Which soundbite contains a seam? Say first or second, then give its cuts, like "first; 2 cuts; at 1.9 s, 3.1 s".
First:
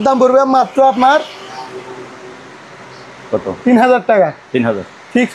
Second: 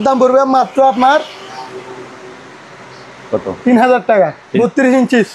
second; 1 cut; at 4.4 s